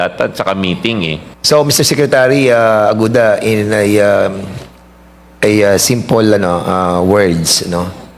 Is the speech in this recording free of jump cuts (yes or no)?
no